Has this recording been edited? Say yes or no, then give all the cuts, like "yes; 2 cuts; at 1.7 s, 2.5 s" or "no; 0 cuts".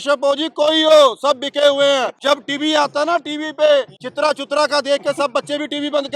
yes; 2 cuts; at 2.1 s, 4.0 s